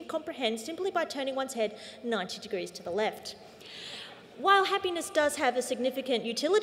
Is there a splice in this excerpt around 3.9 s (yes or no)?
no